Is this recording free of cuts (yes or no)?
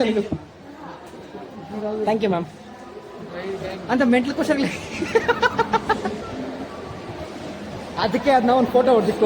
yes